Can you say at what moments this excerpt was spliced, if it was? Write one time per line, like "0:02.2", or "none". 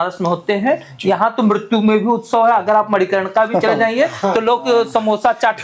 none